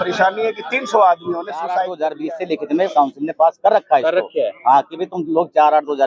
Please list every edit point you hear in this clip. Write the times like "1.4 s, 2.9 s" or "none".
1.9 s